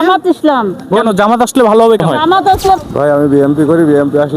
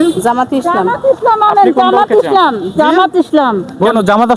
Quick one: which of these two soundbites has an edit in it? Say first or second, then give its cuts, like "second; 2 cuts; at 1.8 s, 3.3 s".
first; 1 cut; at 2.8 s